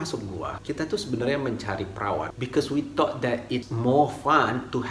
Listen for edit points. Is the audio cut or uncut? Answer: uncut